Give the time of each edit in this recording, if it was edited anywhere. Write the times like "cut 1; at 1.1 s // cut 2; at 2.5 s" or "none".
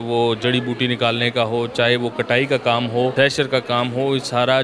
cut 1; at 3.1 s